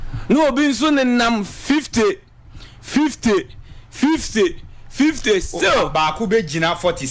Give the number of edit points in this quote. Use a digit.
0